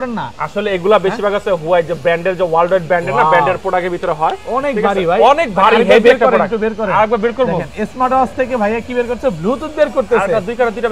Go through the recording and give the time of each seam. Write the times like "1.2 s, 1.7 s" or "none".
none